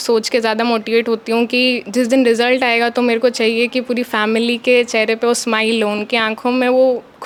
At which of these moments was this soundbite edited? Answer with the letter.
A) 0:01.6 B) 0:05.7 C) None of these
C